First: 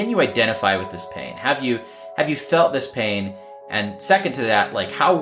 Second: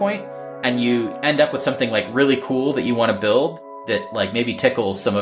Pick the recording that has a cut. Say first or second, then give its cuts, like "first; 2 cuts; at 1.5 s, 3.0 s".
second; 2 cuts; at 1.1 s, 3.7 s